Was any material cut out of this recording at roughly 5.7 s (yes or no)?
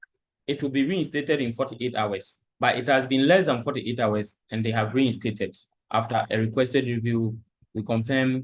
yes